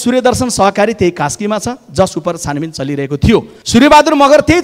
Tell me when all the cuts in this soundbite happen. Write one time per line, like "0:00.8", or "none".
0:03.6